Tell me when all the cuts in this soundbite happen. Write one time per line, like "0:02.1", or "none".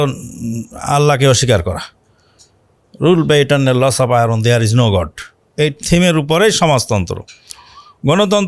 none